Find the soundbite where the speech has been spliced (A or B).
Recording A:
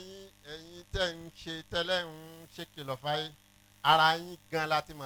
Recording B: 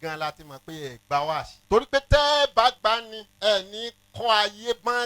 B